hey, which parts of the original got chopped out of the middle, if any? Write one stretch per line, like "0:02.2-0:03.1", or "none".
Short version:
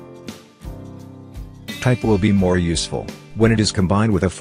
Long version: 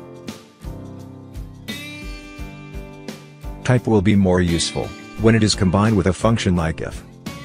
0:01.8-0:03.7